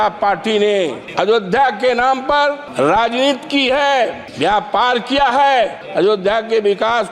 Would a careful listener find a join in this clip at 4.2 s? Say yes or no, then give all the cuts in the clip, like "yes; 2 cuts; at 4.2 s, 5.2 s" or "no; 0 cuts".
yes; 4 cuts; at 1.0 s, 2.6 s, 4.2 s, 5.8 s